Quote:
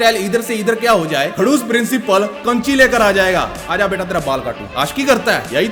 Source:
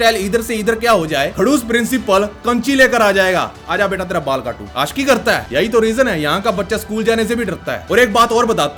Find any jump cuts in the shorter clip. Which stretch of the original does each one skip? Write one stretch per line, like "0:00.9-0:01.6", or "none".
none